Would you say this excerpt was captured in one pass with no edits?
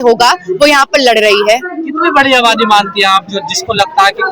yes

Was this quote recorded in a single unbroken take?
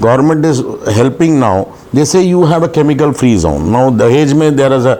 yes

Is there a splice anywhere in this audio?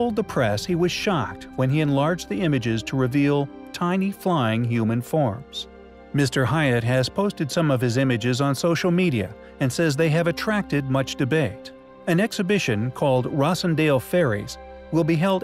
no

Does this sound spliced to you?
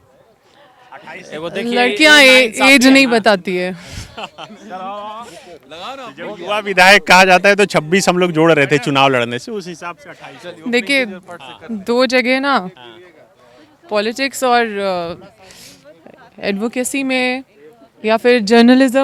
no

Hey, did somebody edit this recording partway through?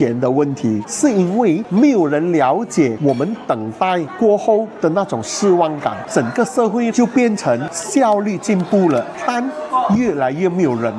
yes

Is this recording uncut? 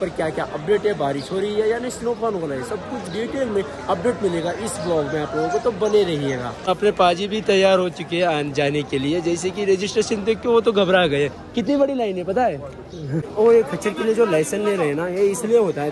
yes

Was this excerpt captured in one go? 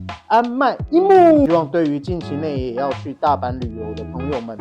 no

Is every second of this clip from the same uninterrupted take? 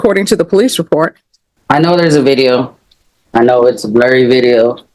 no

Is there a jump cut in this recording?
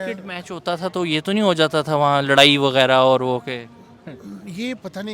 no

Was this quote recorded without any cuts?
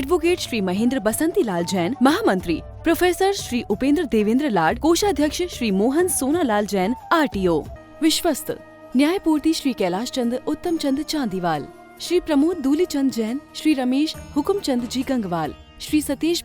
no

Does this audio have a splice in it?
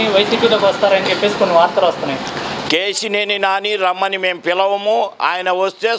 no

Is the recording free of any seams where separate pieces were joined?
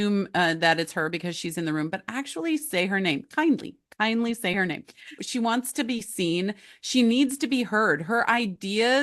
no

